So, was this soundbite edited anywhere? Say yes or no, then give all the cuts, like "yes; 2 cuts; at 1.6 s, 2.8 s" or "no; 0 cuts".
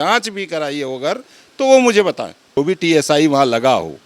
yes; 1 cut; at 2.6 s